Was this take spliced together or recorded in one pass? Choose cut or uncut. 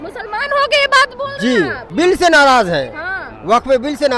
cut